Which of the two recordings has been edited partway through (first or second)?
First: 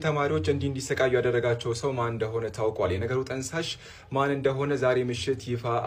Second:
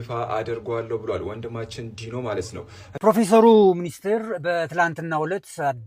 second